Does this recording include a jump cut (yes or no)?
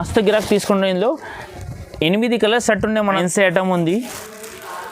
yes